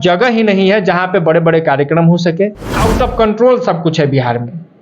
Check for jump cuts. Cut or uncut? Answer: cut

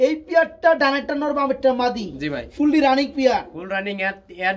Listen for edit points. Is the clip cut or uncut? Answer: uncut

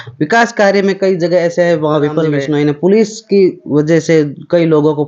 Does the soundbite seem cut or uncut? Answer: cut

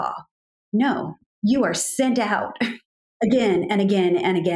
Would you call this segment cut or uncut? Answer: cut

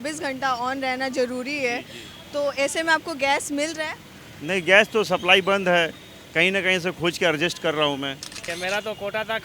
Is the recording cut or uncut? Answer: cut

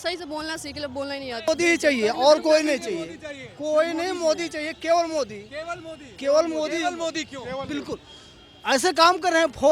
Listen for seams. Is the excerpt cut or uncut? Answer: cut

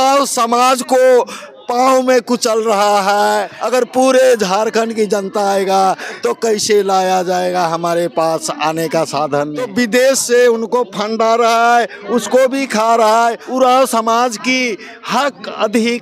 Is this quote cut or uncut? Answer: cut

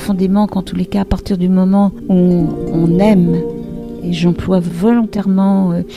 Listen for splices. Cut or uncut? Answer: cut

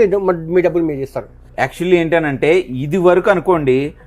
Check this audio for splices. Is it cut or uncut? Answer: uncut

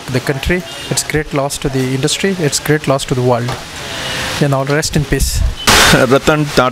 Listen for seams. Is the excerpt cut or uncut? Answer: cut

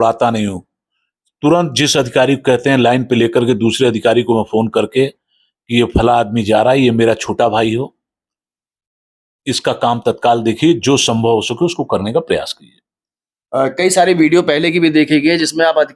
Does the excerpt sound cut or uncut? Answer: uncut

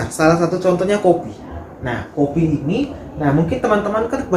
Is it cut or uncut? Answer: uncut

